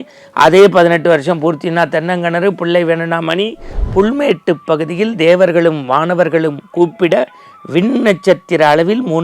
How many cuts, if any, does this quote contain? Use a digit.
1